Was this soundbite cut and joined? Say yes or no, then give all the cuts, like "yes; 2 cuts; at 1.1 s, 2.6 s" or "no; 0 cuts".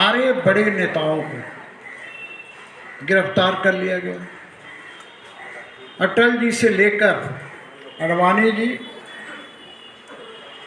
no; 0 cuts